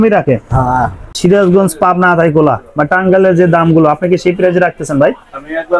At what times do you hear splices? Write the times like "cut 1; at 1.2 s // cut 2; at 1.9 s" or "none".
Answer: cut 1; at 1.1 s